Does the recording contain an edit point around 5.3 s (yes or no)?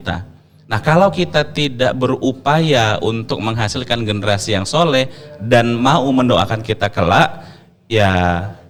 no